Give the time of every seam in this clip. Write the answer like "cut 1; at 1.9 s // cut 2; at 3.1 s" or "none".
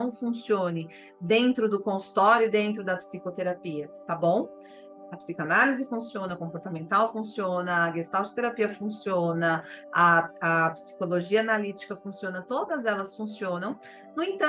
none

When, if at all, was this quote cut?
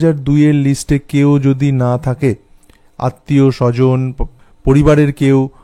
none

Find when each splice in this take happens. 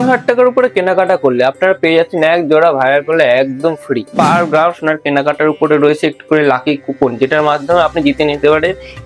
cut 1; at 4.1 s

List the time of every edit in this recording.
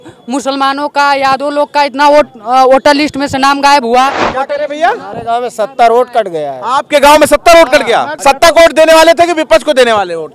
cut 1; at 4.3 s // cut 2; at 8.2 s

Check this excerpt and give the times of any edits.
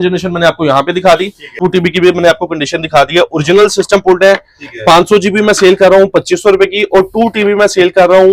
cut 1; at 1.6 s

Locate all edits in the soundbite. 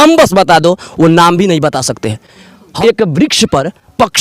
cut 1; at 2.6 s

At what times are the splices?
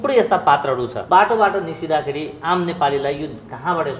cut 1; at 1.0 s

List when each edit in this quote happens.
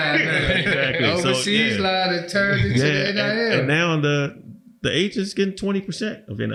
none

